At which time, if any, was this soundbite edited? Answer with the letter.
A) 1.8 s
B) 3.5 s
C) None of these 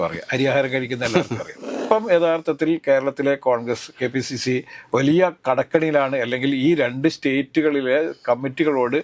A